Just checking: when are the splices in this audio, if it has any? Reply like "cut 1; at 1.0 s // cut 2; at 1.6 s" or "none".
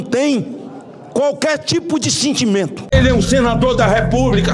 cut 1; at 2.9 s